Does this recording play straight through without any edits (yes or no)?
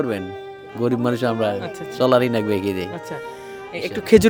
yes